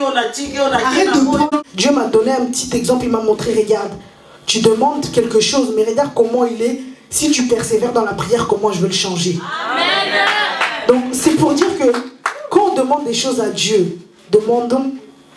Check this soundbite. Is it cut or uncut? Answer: cut